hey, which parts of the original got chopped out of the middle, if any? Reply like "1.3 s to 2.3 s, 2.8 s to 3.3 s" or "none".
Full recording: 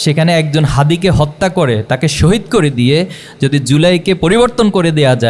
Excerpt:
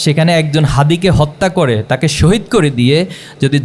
none